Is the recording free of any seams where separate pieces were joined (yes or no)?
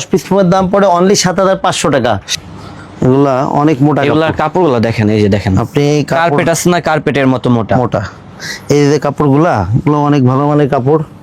no